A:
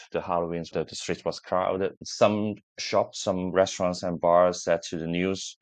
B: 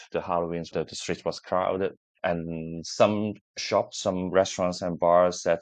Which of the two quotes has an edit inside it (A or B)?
A